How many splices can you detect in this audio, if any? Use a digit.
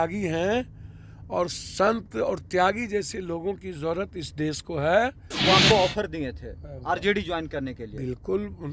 1